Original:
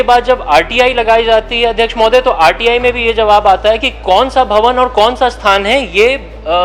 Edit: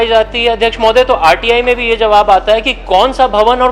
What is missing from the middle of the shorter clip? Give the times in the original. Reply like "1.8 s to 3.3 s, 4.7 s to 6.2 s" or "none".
none